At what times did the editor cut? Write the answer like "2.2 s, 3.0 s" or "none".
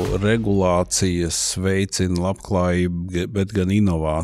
none